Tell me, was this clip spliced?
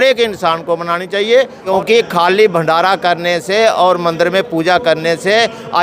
yes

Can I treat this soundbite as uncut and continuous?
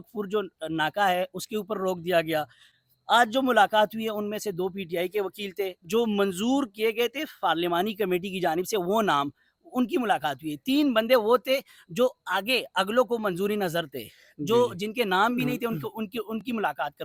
yes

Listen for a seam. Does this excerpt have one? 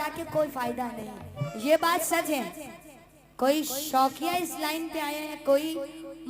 yes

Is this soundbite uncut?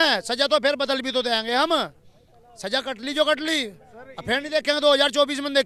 yes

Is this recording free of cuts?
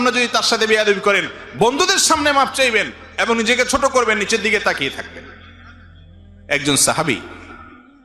yes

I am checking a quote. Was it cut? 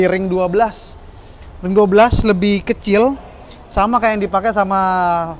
no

